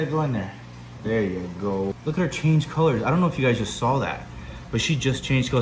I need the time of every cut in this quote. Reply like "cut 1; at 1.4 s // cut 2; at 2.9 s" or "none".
cut 1; at 1.9 s

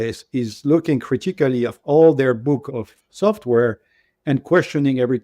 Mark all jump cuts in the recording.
cut 1; at 2.6 s

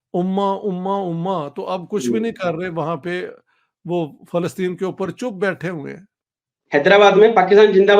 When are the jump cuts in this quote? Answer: cut 1; at 6.6 s

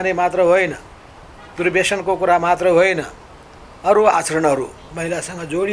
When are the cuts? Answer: none

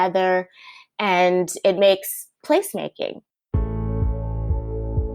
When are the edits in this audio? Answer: cut 1; at 3.3 s

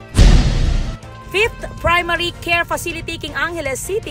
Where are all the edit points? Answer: cut 1; at 1.2 s

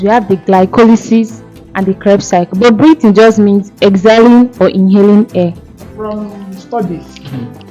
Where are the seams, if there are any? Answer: cut 1; at 5.8 s

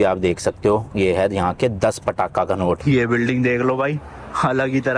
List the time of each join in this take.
cut 1; at 2.8 s

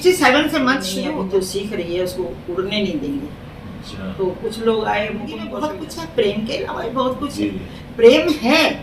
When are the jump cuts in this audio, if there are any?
cut 1; at 0.9 s // cut 2; at 5.5 s

